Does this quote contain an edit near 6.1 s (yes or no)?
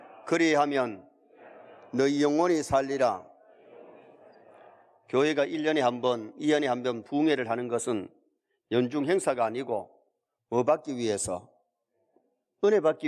no